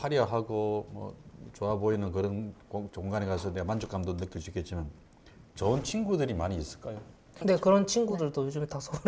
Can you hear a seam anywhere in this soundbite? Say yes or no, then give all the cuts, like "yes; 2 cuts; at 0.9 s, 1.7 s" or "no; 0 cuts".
yes; 1 cut; at 7.3 s